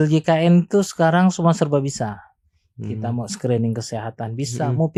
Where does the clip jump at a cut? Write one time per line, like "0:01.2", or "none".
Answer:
none